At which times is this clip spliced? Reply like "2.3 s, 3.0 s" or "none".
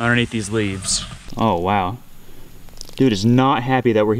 1.2 s